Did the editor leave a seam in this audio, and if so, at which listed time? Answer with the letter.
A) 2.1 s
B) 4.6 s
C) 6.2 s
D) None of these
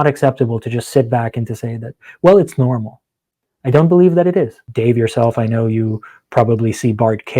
B